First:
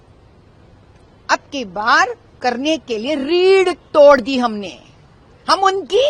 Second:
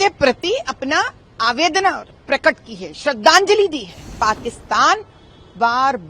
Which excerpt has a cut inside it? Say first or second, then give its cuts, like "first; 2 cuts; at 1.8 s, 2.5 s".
second; 1 cut; at 4.1 s